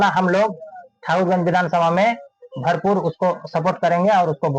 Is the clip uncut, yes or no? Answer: yes